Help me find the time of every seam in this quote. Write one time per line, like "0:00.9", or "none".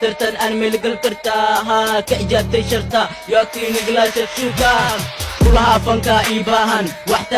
none